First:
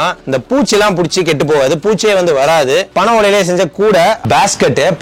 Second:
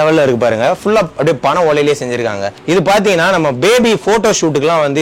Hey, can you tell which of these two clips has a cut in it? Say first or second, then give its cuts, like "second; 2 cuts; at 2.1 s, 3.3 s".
first; 2 cuts; at 2.9 s, 4.2 s